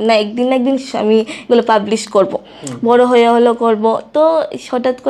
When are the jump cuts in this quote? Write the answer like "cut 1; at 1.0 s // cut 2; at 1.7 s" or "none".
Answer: none

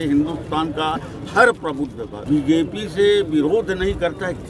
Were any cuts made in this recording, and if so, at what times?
cut 1; at 2.2 s

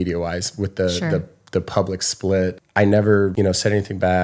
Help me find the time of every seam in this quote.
cut 1; at 2.6 s // cut 2; at 3.3 s

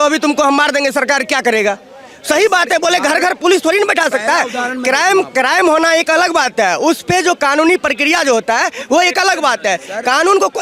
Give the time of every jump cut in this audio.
none

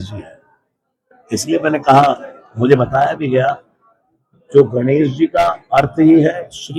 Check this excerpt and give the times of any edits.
none

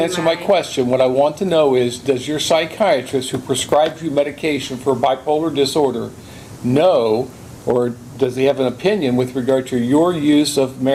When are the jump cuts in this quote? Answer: none

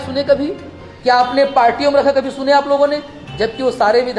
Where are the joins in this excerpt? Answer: none

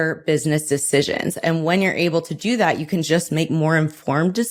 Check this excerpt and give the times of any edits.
none

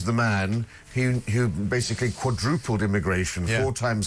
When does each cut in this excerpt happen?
none

